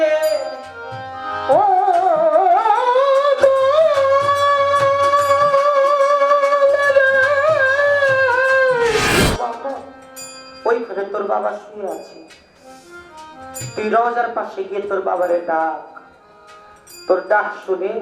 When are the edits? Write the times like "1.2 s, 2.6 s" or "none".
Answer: 9.2 s